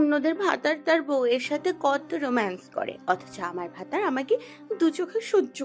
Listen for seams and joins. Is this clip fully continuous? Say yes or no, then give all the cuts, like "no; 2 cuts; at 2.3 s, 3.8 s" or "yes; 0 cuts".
yes; 0 cuts